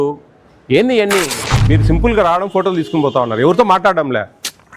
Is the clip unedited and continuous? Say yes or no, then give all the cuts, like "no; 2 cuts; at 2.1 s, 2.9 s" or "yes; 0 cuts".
no; 1 cut; at 1.6 s